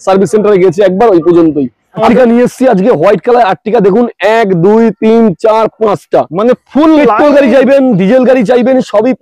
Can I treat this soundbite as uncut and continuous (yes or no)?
no